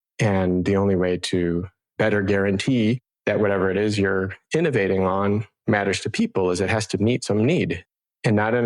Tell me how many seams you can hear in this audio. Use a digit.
1